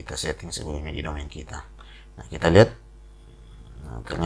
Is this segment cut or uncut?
uncut